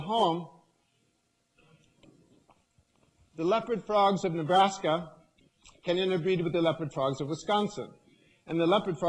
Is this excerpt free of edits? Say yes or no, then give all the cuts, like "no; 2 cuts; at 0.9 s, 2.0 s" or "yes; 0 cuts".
no; 1 cut; at 5.8 s